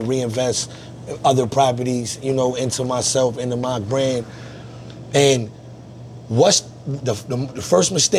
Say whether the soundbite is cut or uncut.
uncut